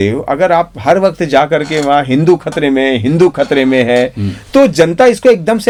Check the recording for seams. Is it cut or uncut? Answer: uncut